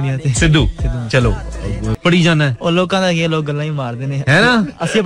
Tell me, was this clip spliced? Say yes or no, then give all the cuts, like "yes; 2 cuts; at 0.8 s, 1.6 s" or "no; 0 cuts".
yes; 1 cut; at 1.9 s